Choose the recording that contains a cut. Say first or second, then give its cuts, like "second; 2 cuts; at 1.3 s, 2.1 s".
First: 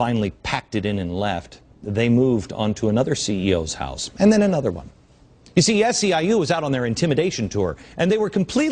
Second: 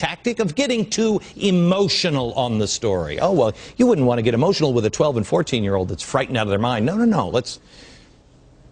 first; 1 cut; at 7.4 s